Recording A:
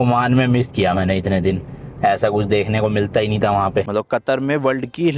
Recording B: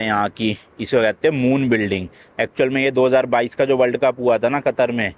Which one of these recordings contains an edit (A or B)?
A